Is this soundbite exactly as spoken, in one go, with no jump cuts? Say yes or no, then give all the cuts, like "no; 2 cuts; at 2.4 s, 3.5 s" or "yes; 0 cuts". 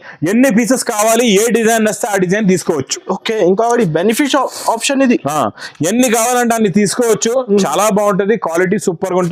yes; 0 cuts